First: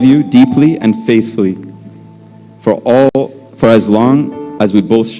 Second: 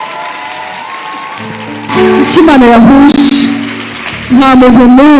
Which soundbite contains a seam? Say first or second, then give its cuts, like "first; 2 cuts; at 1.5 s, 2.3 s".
second; 1 cut; at 1.9 s